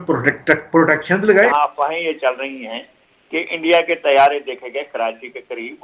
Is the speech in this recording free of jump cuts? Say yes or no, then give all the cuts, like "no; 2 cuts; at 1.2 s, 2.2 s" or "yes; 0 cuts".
no; 1 cut; at 1.5 s